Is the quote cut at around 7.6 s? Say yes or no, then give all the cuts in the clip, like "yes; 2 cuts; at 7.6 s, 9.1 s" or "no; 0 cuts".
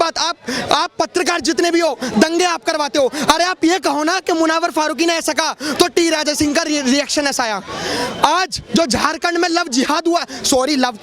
no; 0 cuts